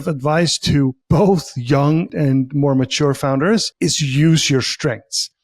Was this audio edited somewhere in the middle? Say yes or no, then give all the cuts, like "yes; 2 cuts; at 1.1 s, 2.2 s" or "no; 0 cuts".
yes; 3 cuts; at 1.0 s, 2.1 s, 3.7 s